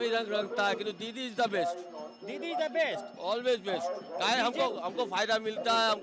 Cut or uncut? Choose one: uncut